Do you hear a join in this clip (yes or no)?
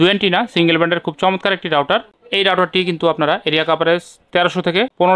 no